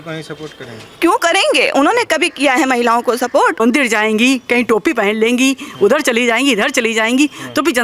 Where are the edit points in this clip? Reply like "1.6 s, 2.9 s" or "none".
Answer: 3.6 s

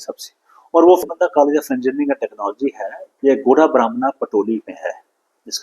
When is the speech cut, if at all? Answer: 1.0 s

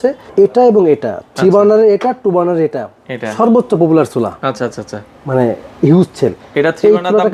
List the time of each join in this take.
none

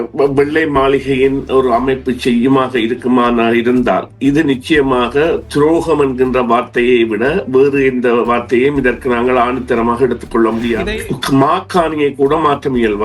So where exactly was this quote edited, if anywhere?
10.8 s

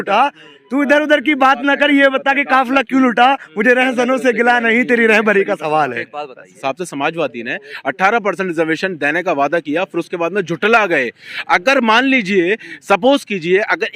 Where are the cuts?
6.6 s

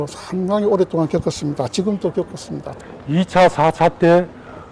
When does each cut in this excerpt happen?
2.8 s

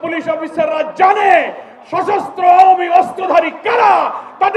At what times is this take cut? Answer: none

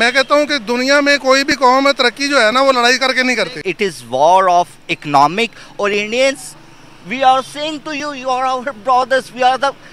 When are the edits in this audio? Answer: 3.6 s

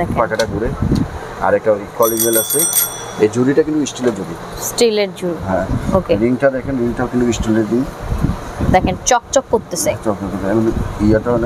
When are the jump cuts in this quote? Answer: none

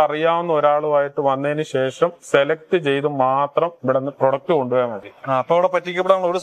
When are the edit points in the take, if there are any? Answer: none

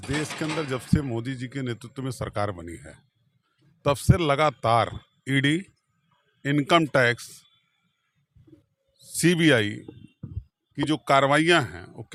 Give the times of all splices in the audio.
none

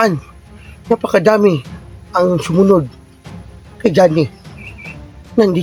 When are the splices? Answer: none

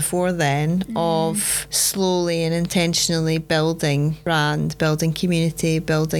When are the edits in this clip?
none

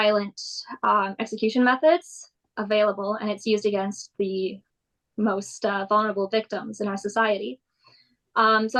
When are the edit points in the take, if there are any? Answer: none

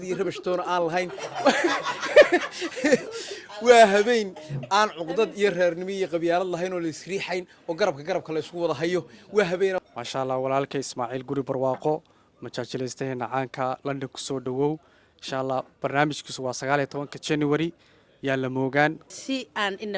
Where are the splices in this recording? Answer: 9.8 s, 19.0 s

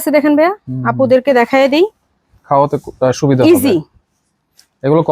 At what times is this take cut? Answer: none

